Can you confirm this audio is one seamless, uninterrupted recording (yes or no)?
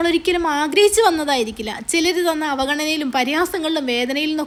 yes